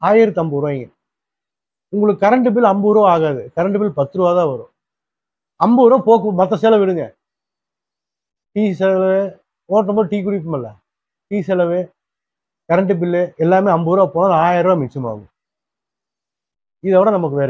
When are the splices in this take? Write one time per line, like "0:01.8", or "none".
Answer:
none